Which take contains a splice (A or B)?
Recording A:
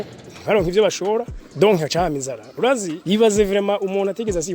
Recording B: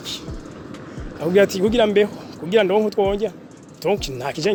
A